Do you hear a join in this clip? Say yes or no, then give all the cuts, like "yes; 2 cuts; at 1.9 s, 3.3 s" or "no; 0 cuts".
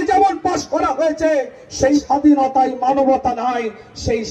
yes; 1 cut; at 2.0 s